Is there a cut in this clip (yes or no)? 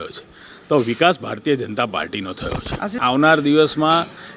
yes